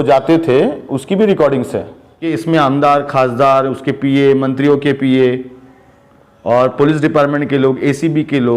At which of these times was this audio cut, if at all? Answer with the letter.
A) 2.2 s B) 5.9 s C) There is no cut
A